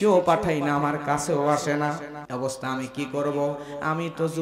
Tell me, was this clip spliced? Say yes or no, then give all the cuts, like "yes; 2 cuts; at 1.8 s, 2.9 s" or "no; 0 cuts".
no; 0 cuts